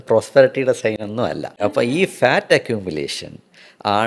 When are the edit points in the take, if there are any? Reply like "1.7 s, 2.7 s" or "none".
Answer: 1.5 s